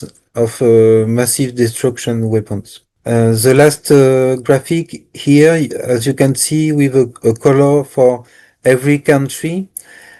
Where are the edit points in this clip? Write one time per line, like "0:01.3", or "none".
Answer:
none